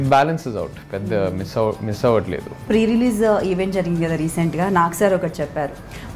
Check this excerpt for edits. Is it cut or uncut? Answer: cut